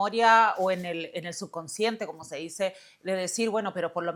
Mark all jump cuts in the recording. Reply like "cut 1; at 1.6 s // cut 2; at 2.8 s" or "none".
none